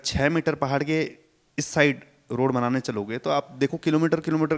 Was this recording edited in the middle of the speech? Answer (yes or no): no